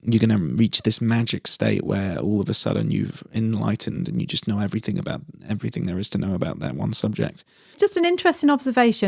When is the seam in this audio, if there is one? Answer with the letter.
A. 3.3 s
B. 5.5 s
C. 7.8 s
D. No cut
C